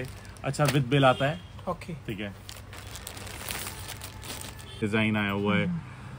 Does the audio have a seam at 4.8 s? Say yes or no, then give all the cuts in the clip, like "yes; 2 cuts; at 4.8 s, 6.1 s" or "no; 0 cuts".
yes; 1 cut; at 4.8 s